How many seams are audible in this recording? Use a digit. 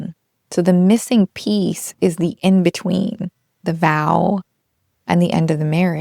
0